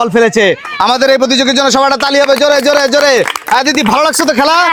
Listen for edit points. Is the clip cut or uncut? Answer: uncut